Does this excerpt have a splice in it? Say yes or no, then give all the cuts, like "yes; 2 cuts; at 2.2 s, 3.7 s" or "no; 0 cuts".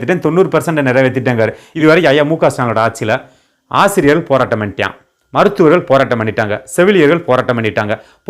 yes; 1 cut; at 1.6 s